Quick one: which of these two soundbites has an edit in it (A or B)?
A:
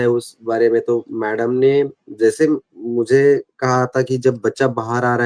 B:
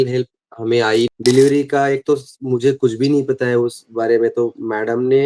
B